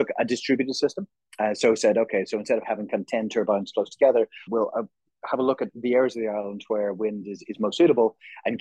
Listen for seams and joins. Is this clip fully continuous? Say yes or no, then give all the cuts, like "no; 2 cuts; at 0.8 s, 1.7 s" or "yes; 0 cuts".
yes; 0 cuts